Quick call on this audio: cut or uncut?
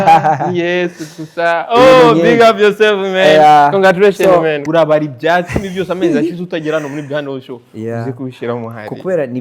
cut